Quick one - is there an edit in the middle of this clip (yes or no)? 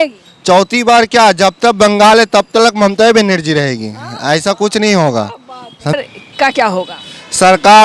yes